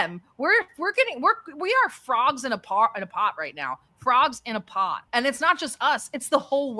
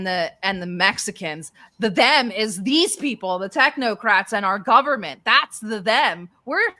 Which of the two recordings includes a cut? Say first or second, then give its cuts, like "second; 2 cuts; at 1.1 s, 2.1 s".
first; 1 cut; at 5.0 s